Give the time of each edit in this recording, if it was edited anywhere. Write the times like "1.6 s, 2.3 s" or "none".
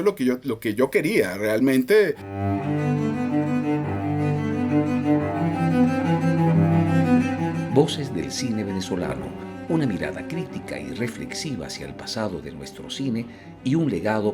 2.2 s